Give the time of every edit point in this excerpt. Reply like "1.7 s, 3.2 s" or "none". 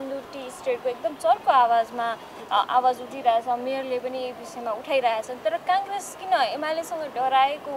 none